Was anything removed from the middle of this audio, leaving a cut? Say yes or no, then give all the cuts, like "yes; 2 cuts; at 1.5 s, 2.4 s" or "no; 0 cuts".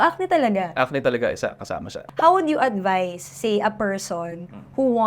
yes; 1 cut; at 1.9 s